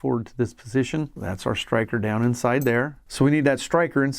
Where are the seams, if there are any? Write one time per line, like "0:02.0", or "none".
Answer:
0:01.2
0:03.0